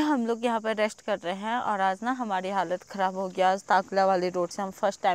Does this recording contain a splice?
no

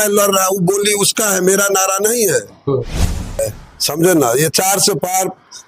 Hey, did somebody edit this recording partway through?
yes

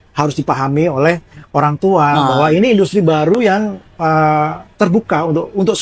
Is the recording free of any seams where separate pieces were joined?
yes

